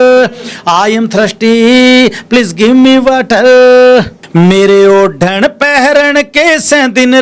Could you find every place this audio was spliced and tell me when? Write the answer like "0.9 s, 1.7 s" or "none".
4.2 s